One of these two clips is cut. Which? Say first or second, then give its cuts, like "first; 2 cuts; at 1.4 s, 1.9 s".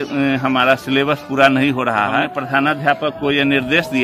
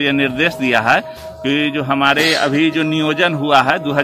first; 1 cut; at 2.3 s